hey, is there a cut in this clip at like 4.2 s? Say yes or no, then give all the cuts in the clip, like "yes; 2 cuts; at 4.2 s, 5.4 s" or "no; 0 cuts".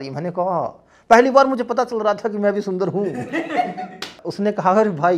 yes; 1 cut; at 4.2 s